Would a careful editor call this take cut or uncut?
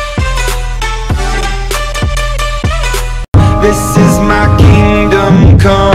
cut